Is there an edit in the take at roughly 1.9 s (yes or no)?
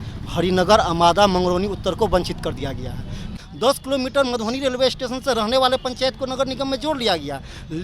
no